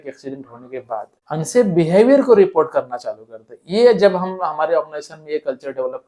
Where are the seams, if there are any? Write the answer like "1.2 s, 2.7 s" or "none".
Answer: 1.2 s